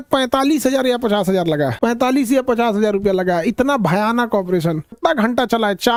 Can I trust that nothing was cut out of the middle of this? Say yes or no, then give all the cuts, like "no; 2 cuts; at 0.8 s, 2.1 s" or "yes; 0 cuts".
yes; 0 cuts